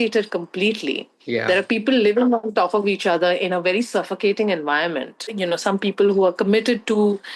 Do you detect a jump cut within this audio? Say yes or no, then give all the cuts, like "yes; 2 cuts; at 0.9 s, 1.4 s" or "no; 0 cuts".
yes; 1 cut; at 5.2 s